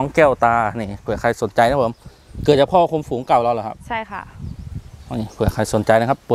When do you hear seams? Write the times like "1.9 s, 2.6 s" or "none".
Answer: none

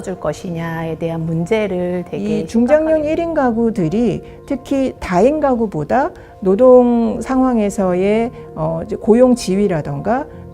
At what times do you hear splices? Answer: 2.2 s

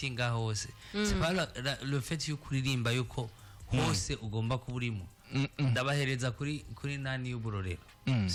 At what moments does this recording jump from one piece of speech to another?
none

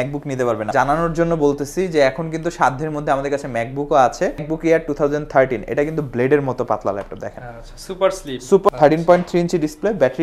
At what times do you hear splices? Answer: 0.7 s, 4.5 s, 8.7 s

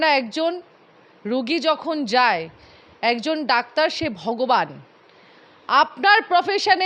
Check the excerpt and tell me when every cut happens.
none

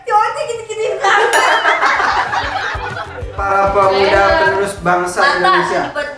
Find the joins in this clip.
3.4 s

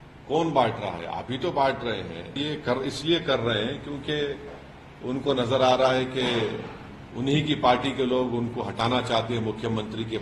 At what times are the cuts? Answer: 2.4 s

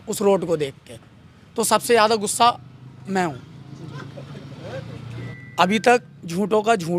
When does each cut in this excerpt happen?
5.3 s

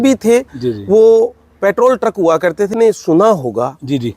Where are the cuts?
2.7 s

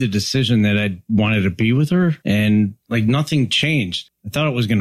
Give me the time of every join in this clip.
2.2 s, 2.8 s, 4.0 s

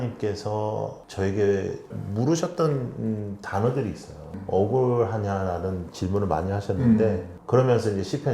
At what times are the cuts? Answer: 2.0 s, 4.3 s

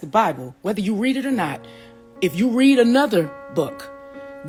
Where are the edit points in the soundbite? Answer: none

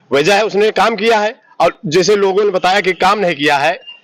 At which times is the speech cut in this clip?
none

